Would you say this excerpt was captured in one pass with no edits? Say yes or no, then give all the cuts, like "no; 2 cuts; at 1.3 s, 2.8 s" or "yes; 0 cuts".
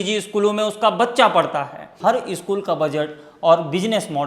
no; 1 cut; at 1.9 s